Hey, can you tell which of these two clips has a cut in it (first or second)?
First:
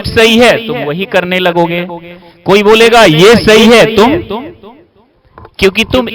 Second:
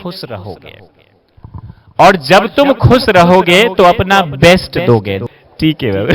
second